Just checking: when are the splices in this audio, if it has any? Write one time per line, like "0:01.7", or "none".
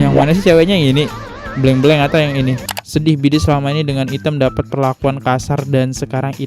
0:02.7